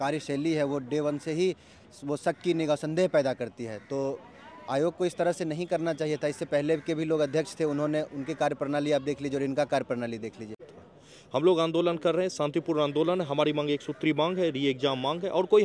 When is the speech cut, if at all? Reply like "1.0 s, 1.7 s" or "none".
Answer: 10.7 s